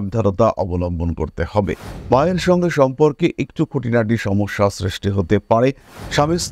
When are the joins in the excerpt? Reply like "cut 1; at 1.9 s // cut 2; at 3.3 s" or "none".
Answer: cut 1; at 1.9 s